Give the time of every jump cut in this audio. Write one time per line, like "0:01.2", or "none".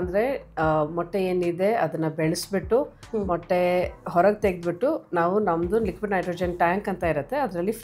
none